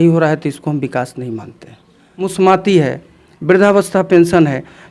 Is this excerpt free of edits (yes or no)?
no